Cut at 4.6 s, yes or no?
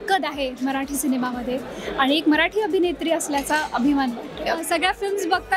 yes